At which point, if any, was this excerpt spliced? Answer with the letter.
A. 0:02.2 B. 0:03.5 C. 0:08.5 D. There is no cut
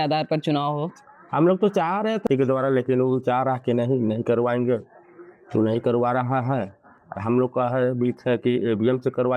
A